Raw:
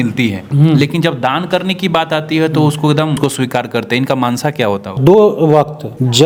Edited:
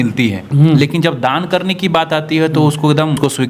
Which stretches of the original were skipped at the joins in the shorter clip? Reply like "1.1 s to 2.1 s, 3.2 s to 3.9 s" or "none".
none